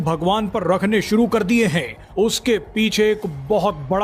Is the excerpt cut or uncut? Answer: uncut